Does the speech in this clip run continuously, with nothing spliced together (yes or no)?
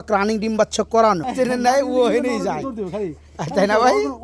no